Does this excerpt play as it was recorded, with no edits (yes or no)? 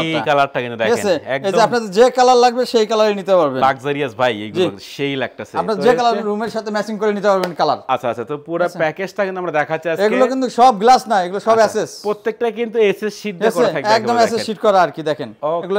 yes